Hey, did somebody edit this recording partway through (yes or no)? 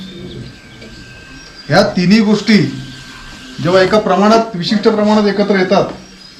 no